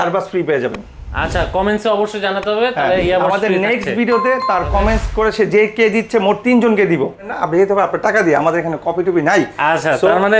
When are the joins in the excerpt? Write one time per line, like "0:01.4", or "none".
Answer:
0:07.4